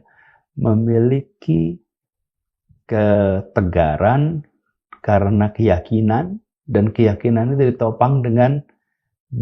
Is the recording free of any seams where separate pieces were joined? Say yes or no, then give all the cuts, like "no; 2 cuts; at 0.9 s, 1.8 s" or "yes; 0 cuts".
yes; 0 cuts